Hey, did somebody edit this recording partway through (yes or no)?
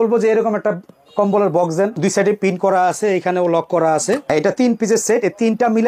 yes